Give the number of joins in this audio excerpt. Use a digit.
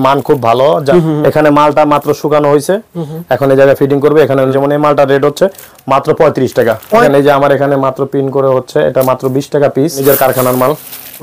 4